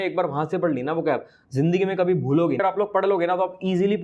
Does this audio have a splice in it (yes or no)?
yes